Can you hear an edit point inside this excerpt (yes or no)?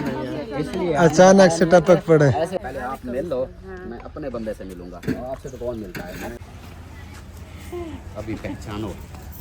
yes